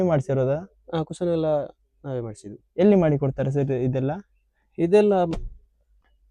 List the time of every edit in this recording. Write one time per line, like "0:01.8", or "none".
none